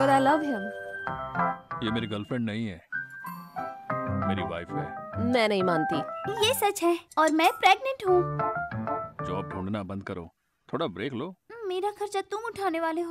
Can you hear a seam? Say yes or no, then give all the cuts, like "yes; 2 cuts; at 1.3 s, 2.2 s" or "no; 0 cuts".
yes; 6 cuts; at 1.7 s, 4.1 s, 5.0 s, 6.2 s, 9.2 s, 11.4 s